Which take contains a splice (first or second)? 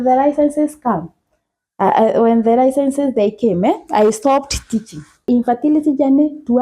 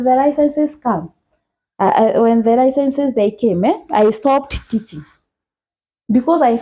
first